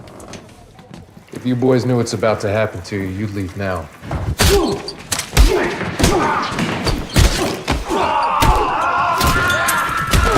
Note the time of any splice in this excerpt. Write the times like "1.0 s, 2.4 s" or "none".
1.0 s, 8.1 s